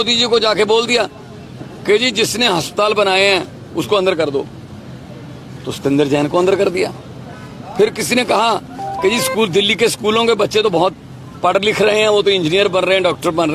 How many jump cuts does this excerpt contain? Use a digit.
0